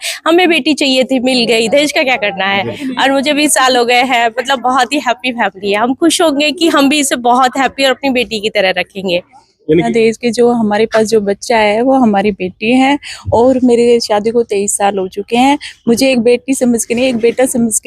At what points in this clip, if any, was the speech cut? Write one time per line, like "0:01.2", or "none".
0:09.9